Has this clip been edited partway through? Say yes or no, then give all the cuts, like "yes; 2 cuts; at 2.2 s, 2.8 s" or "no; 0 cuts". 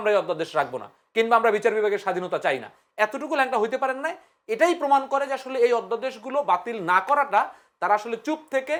no; 0 cuts